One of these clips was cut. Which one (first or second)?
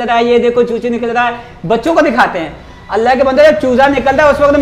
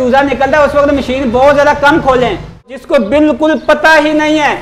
second